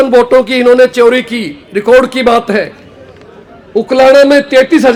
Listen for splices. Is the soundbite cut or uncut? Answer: uncut